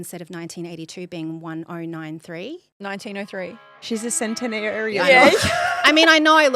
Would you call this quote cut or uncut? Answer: cut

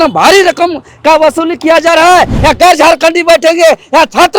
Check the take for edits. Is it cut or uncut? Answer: cut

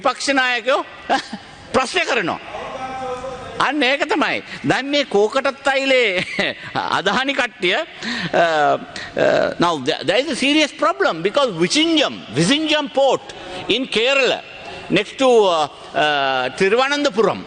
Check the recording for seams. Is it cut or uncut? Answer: uncut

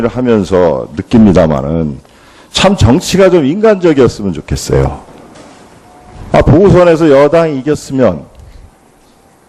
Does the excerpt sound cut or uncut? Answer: uncut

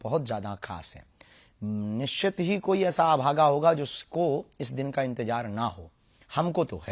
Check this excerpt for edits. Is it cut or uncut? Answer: uncut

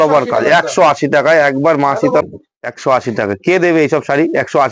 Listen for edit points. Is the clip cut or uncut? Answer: cut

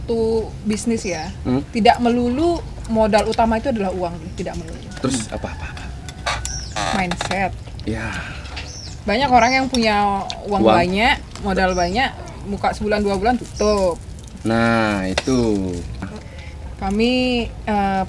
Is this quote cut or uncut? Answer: cut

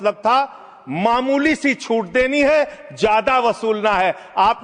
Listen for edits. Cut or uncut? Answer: uncut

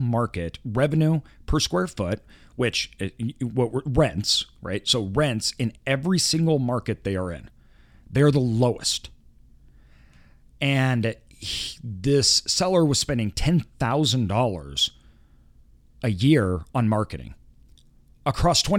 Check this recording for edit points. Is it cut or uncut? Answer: uncut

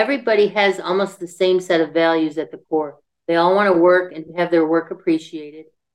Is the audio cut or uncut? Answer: uncut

